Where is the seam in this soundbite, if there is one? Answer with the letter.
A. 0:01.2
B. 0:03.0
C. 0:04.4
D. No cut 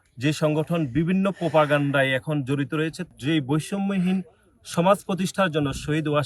B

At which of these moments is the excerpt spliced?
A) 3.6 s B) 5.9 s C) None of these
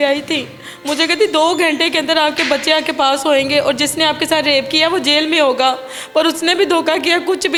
C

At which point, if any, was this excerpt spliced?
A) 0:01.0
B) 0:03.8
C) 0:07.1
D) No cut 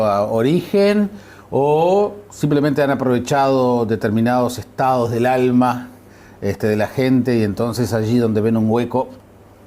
C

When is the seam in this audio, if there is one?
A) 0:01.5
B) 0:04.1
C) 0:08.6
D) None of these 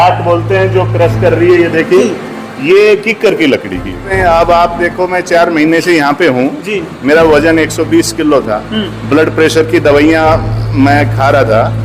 B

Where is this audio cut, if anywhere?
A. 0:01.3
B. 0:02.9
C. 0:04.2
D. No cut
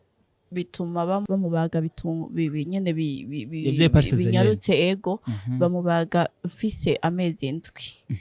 A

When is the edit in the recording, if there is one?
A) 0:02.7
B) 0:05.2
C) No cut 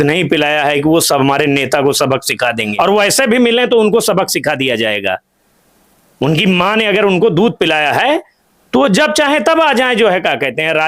A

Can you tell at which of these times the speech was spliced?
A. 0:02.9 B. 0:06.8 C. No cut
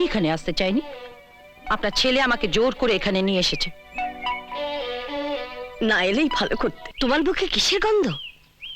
B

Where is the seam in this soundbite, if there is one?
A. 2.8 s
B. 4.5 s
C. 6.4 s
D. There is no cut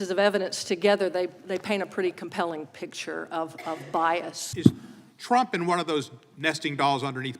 B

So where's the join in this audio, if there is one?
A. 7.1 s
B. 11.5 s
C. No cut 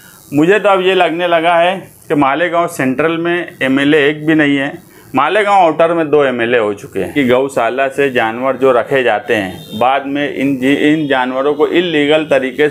A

